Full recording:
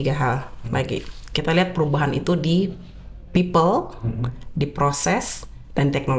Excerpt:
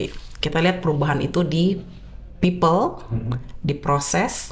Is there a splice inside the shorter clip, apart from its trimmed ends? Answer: no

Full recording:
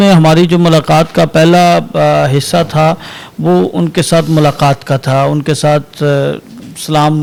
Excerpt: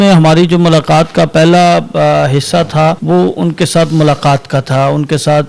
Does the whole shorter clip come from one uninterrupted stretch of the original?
no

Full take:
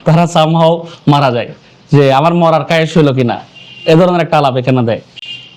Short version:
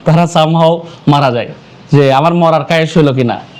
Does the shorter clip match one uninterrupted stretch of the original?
yes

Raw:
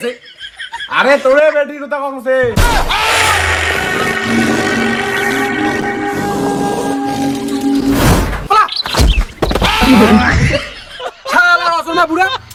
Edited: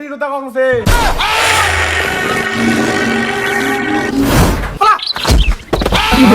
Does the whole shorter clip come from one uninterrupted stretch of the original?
no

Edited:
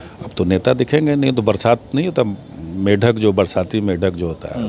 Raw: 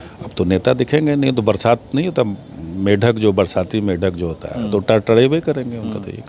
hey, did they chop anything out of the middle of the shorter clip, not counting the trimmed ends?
no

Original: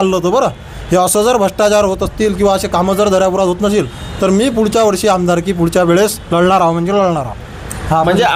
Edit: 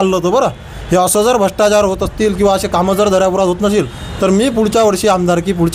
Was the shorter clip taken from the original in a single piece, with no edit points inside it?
yes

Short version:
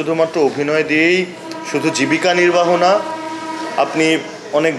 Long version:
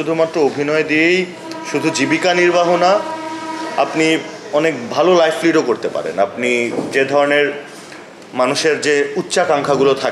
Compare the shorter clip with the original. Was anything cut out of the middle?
no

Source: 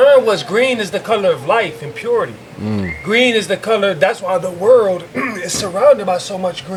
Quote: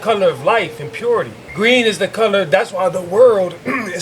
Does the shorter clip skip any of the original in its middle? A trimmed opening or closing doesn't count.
yes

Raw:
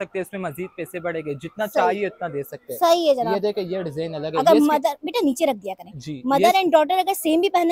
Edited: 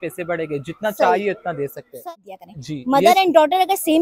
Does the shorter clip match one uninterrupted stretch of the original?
no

